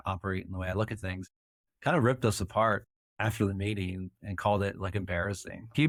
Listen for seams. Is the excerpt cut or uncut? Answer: uncut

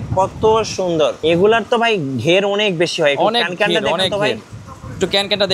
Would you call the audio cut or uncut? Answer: cut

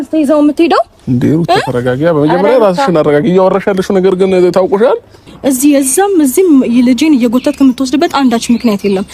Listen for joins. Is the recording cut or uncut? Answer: cut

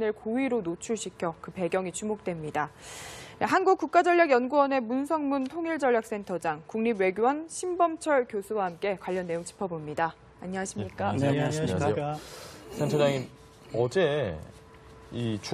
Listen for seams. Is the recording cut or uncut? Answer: uncut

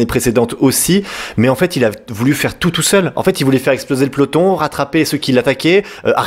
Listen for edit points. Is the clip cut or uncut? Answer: uncut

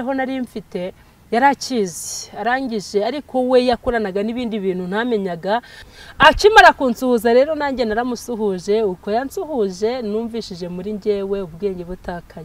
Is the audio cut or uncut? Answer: cut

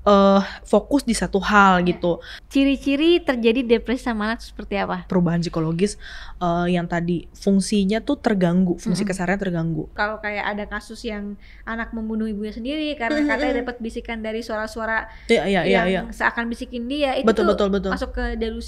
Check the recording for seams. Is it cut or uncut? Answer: cut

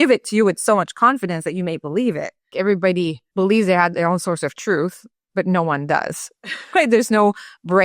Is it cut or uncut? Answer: cut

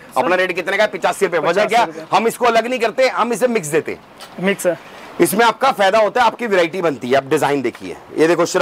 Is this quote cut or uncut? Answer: uncut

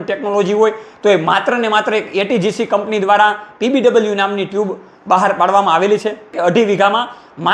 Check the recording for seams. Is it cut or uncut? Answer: cut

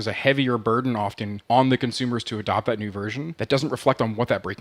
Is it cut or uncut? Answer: cut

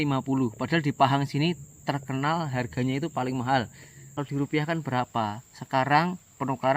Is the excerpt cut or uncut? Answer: cut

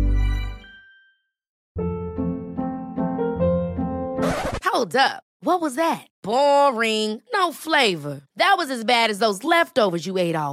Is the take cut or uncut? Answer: cut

